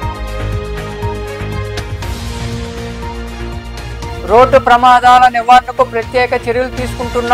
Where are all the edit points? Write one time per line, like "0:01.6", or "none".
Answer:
0:01.8